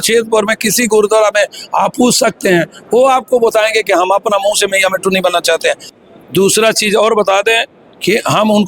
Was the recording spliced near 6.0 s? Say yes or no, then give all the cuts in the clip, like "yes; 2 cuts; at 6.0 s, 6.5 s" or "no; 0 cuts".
yes; 1 cut; at 6.0 s